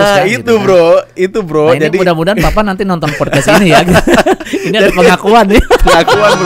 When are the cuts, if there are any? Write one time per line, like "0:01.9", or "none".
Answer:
none

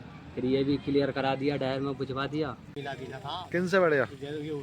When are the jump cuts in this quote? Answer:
0:02.7

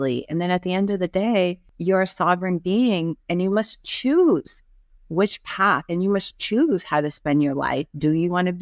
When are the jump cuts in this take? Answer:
0:01.7

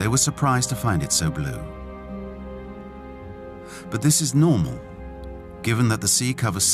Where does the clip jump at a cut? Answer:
none

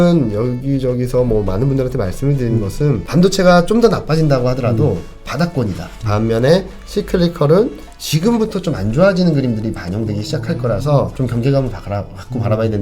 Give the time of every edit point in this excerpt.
0:03.0
0:05.9
0:11.1

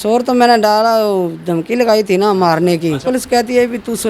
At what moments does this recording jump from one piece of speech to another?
0:03.0

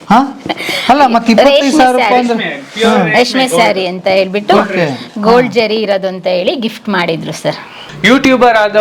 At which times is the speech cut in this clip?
0:07.8

